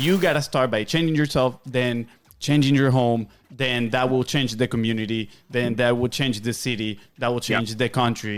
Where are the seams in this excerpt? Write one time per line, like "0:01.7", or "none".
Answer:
none